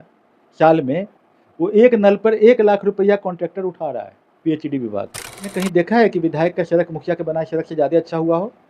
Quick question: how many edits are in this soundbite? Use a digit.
1